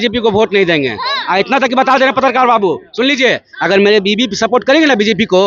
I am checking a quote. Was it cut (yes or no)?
no